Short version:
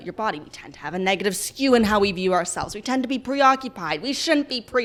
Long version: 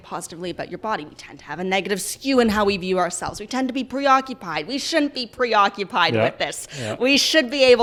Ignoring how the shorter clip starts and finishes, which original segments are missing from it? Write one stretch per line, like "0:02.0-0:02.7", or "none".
none